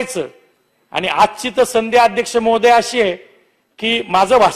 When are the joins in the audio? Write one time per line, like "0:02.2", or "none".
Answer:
none